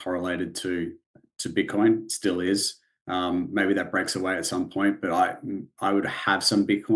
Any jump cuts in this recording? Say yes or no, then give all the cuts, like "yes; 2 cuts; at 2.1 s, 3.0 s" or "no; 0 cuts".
no; 0 cuts